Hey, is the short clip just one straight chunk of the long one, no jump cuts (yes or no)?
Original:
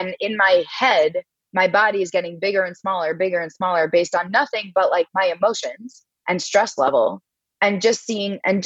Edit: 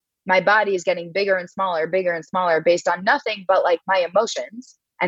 yes